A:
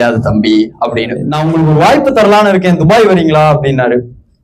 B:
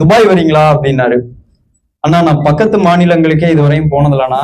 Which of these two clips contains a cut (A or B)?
A